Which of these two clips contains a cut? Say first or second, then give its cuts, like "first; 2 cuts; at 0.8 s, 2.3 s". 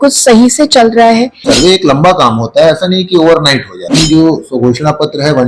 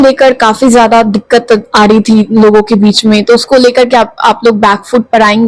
first; 2 cuts; at 1.4 s, 3.9 s